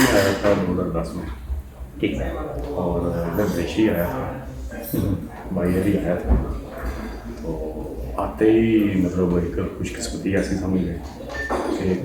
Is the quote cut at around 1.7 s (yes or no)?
no